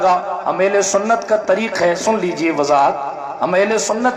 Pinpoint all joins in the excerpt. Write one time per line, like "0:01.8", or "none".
none